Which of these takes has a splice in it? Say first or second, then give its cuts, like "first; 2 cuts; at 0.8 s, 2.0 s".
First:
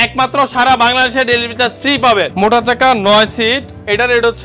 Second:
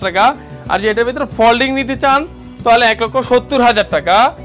first; 1 cut; at 2.3 s